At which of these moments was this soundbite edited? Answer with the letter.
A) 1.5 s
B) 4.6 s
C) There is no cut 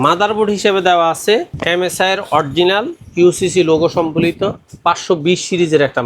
A